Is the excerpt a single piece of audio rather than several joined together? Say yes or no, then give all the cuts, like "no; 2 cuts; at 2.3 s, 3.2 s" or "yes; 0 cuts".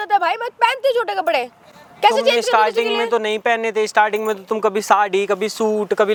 yes; 0 cuts